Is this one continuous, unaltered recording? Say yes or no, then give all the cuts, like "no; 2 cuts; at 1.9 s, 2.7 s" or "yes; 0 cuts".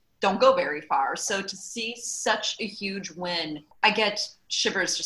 no; 1 cut; at 3.8 s